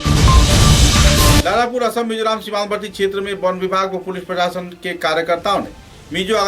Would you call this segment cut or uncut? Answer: uncut